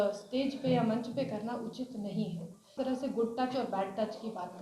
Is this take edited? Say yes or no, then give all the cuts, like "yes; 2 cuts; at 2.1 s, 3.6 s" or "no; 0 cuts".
yes; 1 cut; at 2.7 s